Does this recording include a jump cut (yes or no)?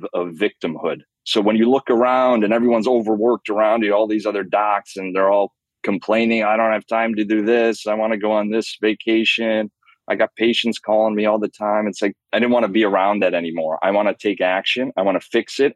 yes